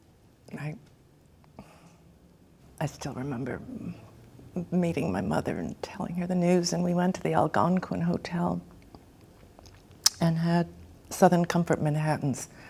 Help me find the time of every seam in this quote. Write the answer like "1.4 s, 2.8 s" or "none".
none